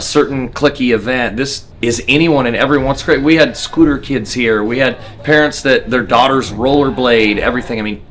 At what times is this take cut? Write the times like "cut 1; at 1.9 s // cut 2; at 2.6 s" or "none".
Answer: cut 1; at 1.6 s